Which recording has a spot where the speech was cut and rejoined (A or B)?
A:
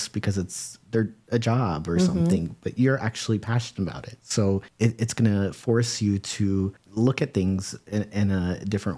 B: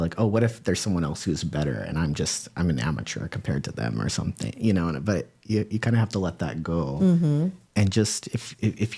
A